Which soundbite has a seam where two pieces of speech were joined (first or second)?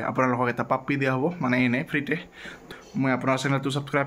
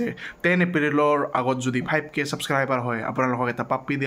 first